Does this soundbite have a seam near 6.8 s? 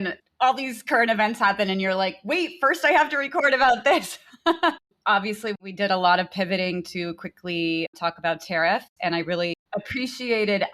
no; 2 cuts; at 4.9 s, 9.6 s

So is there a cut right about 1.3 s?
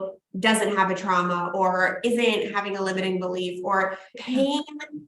no; 1 cut; at 4.1 s

